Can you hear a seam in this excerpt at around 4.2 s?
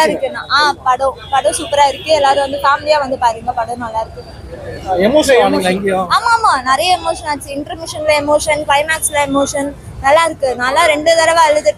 no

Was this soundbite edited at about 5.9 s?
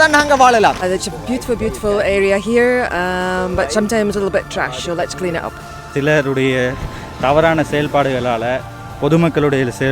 yes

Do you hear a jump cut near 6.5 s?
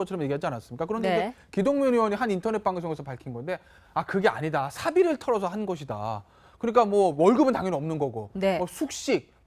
no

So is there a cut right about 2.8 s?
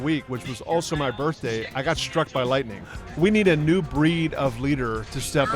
yes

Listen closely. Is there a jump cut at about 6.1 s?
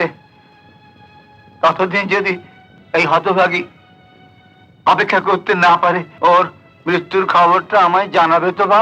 yes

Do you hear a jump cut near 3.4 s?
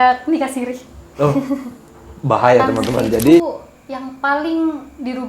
yes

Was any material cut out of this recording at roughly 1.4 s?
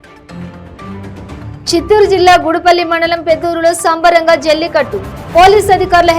yes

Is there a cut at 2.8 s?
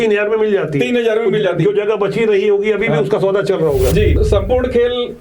no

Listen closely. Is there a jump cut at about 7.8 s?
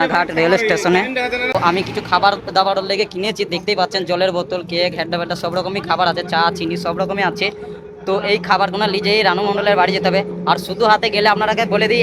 no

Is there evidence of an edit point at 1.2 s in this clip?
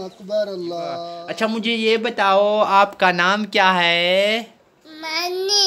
yes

